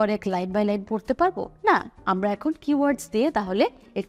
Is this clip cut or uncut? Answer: uncut